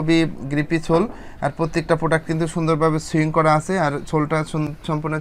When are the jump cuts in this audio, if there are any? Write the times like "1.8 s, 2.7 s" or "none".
none